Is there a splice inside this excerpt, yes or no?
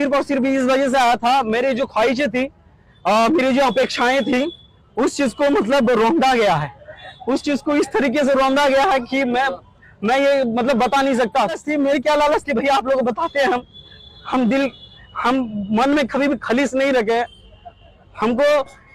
yes